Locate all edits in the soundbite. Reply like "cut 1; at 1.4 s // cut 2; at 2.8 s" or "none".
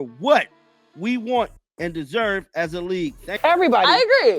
cut 1; at 3.3 s